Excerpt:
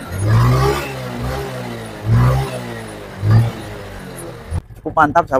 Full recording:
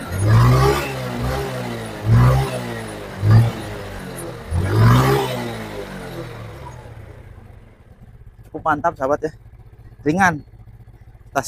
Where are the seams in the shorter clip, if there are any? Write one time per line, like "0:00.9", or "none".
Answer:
0:04.5